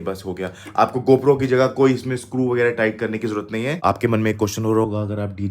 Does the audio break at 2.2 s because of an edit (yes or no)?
no